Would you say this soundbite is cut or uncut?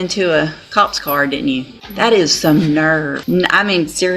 cut